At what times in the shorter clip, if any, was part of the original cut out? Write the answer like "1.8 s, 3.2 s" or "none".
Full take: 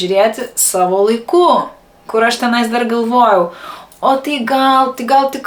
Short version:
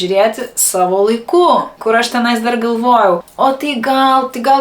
1.7 s, 3.3 s